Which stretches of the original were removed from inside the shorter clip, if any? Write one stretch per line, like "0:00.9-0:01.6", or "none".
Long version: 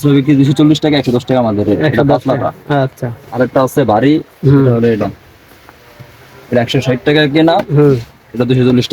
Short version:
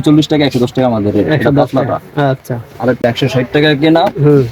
0:03.5-0:06.5